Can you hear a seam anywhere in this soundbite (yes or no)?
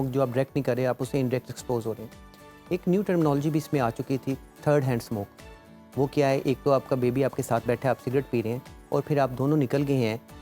no